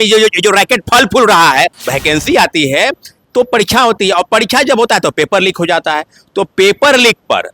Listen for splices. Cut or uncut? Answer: cut